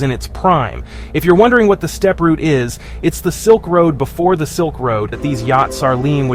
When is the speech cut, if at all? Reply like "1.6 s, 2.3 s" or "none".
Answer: 5.2 s